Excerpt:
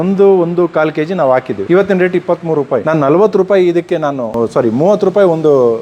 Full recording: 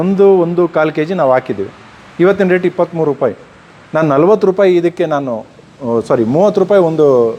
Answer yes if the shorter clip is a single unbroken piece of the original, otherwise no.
no